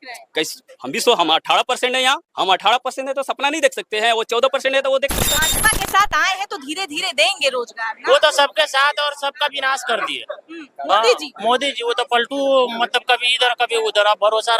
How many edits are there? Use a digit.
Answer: 2